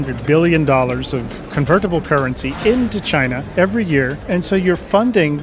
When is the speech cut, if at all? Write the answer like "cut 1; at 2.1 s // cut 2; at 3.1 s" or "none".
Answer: cut 1; at 1.4 s // cut 2; at 4.2 s